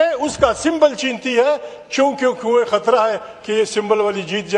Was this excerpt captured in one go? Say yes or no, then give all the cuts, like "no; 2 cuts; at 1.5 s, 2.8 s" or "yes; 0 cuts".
yes; 0 cuts